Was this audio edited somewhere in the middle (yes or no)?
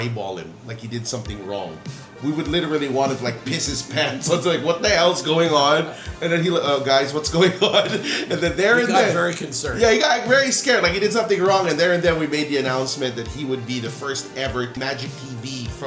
yes